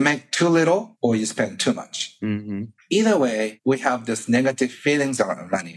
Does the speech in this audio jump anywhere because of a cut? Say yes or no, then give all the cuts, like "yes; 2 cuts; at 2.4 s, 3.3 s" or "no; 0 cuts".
yes; 3 cuts; at 0.9 s, 2.7 s, 3.5 s